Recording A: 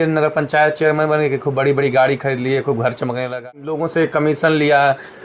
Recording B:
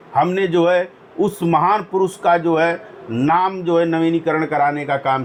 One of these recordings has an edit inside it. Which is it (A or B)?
A